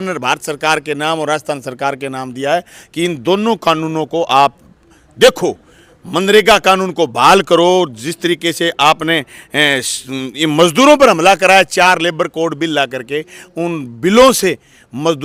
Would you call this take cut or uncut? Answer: uncut